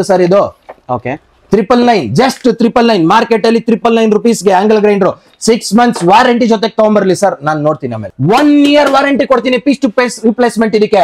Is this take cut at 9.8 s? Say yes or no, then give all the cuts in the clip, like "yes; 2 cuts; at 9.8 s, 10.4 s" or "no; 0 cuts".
no; 1 cut; at 8.1 s